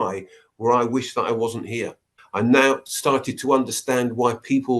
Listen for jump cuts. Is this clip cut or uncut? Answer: cut